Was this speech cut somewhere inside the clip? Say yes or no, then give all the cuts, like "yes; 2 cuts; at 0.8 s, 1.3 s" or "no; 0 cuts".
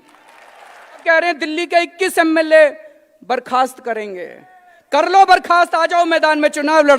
yes; 1 cut; at 1.0 s